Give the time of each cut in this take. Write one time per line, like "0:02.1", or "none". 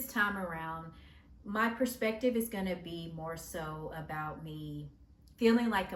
none